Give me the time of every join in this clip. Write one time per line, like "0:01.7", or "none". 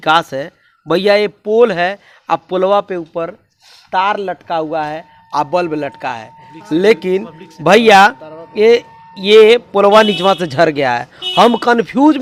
none